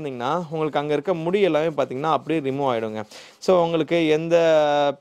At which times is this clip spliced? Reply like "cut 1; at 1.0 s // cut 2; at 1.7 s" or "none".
none